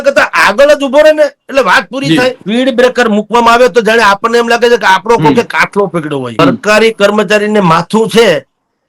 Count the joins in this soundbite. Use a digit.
2